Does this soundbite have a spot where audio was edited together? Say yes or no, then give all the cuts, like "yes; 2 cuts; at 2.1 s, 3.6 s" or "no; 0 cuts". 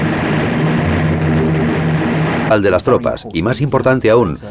no; 0 cuts